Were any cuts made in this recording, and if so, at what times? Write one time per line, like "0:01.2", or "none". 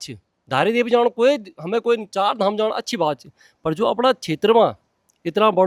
none